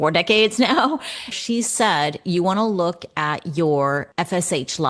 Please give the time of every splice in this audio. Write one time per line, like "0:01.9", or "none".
0:01.4
0:04.1